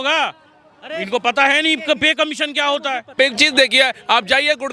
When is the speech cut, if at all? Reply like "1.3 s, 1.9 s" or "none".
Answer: 3.2 s